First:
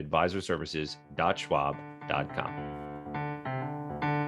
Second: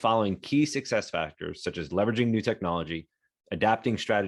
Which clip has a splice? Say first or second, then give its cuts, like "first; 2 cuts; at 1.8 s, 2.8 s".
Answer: first; 1 cut; at 2.5 s